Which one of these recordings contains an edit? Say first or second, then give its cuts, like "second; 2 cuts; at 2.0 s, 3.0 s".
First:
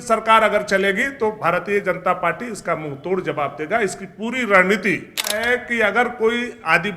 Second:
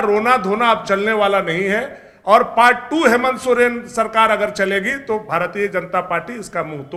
first; 1 cut; at 5.4 s